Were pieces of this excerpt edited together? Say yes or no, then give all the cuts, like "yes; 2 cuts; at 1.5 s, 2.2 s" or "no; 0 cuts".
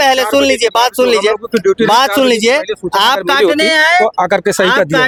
no; 0 cuts